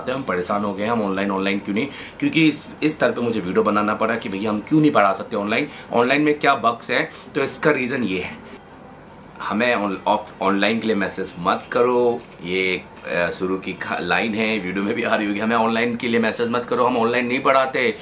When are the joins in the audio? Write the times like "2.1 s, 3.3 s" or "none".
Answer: 8.5 s